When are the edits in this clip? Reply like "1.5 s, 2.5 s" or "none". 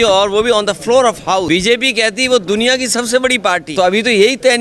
1.5 s, 3.7 s